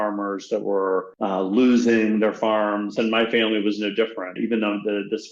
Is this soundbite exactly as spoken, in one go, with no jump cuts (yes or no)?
no